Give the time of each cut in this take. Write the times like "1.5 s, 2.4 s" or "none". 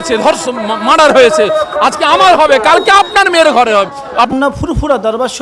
4.1 s